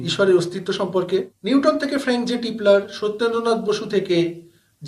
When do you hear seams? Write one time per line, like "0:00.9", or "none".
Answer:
0:01.3